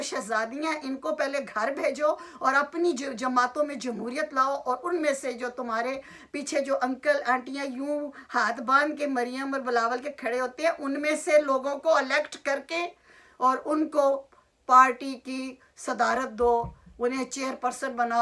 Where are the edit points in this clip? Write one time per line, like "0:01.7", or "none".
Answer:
none